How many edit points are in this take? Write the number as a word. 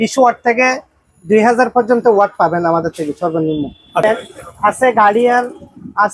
one